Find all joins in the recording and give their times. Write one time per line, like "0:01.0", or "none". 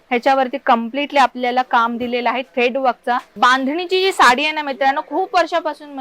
0:03.3